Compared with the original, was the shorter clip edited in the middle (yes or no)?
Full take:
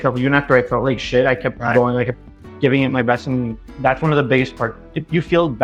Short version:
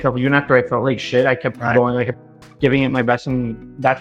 no